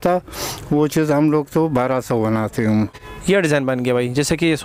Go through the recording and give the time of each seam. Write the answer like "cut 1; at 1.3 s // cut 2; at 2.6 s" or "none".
cut 1; at 2.9 s